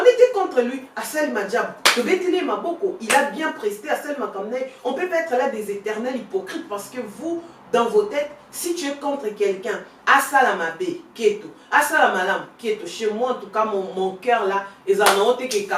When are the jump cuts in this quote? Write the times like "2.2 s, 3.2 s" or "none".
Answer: none